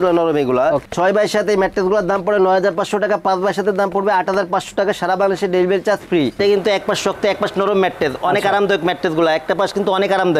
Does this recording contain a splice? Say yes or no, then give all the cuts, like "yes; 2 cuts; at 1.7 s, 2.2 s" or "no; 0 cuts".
yes; 1 cut; at 6.4 s